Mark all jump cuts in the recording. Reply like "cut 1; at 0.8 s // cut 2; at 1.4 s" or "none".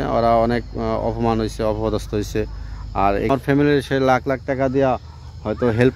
cut 1; at 3.3 s